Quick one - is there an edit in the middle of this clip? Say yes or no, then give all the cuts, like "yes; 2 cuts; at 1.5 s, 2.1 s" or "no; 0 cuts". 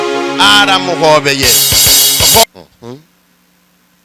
yes; 1 cut; at 2.4 s